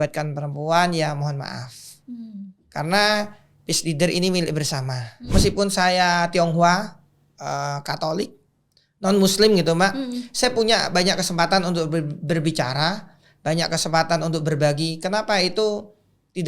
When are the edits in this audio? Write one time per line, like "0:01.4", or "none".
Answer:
0:05.3